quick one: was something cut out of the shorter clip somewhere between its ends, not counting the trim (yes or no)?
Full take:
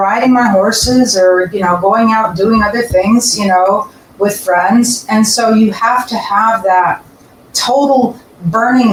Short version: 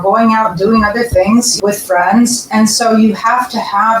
yes